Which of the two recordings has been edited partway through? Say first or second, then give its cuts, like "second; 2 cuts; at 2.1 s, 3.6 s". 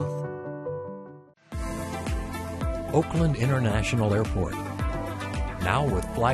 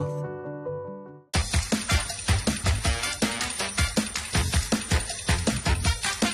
first; 1 cut; at 1.2 s